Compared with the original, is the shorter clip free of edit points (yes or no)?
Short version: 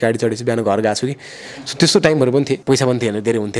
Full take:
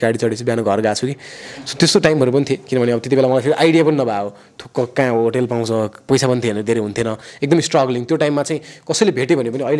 no